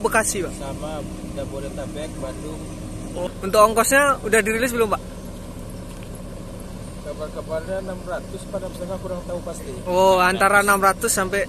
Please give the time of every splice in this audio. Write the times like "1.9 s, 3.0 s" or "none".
3.3 s